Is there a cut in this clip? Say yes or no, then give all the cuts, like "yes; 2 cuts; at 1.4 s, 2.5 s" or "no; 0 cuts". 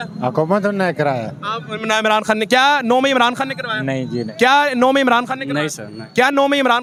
no; 0 cuts